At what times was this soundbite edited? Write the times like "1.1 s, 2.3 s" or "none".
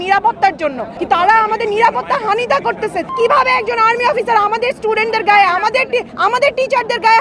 0.9 s, 3.1 s, 6.1 s